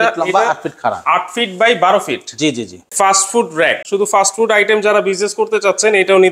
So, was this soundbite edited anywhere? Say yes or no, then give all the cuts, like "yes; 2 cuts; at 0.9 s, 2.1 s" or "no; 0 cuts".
yes; 2 cuts; at 2.8 s, 3.8 s